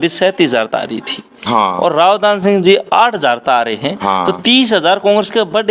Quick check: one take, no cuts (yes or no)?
yes